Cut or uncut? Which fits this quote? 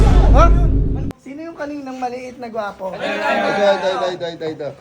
cut